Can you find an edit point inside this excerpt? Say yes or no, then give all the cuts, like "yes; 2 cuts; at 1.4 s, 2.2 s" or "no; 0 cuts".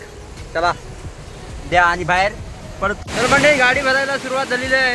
yes; 1 cut; at 3.0 s